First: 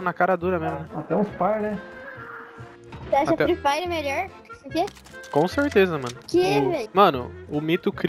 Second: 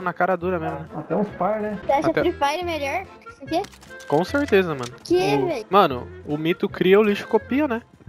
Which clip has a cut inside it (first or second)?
second